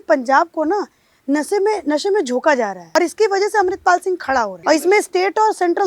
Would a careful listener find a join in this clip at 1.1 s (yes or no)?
no